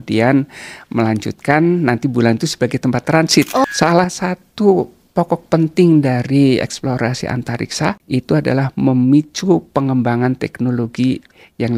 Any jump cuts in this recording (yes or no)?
yes